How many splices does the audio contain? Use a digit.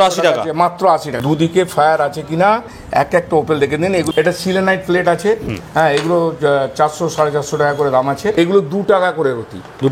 3